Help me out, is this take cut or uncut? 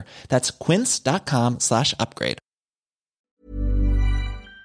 cut